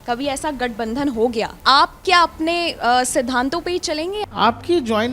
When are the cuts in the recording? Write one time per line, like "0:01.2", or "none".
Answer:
0:01.5
0:04.2